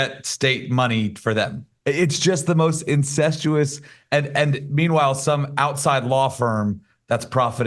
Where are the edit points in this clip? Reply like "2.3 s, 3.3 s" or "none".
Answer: none